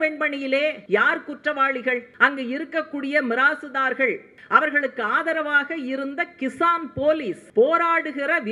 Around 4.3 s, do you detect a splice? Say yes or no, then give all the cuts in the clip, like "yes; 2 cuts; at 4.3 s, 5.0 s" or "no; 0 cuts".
yes; 4 cuts; at 0.8 s, 2.1 s, 4.3 s, 7.4 s